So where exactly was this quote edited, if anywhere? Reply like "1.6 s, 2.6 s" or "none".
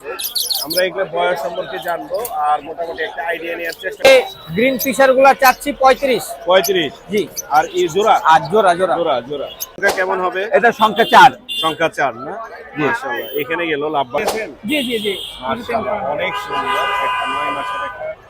4.1 s, 9.8 s, 14.2 s